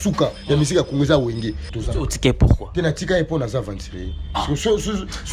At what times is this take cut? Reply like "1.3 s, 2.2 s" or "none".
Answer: 1.6 s